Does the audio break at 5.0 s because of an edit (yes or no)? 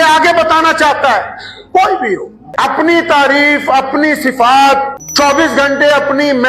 yes